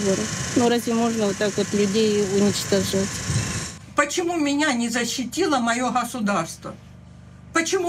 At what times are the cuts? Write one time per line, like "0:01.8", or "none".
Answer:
0:03.7